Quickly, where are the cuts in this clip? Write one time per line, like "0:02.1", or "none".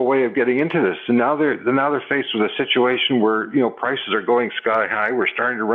none